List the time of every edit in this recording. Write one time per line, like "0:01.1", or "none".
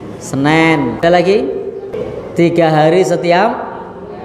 0:01.0
0:02.0

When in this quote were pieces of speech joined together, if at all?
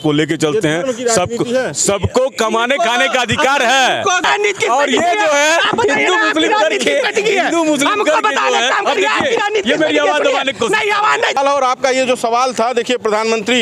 0:04.2
0:11.4

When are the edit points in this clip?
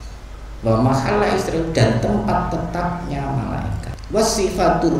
0:03.9

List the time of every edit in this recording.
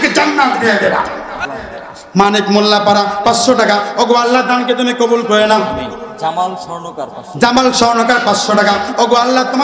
0:01.4

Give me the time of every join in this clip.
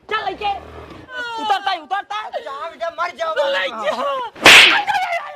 0:01.1

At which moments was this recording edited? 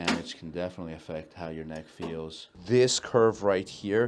0:02.6

